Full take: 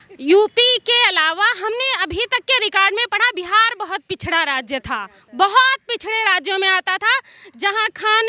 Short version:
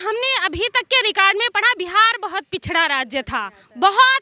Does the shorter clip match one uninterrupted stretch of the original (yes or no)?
yes